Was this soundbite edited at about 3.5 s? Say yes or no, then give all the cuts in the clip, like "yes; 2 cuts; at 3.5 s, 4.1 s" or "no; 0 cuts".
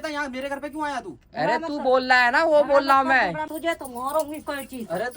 yes; 1 cut; at 3.5 s